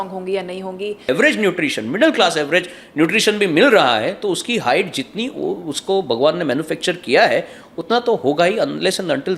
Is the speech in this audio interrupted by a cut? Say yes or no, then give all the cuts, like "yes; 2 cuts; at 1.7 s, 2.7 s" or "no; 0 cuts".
yes; 1 cut; at 1.1 s